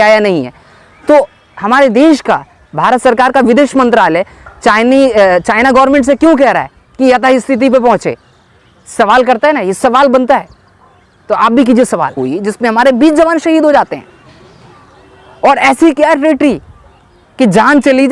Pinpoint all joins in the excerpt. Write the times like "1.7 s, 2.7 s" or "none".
12.3 s